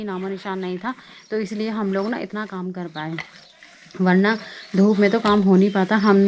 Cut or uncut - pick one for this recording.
uncut